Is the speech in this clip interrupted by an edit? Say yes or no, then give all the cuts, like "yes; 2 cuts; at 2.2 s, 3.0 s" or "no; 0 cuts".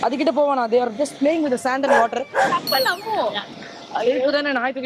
no; 0 cuts